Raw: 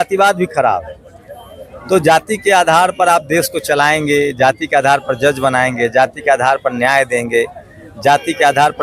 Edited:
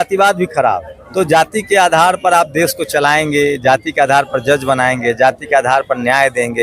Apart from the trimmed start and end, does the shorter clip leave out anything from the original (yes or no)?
yes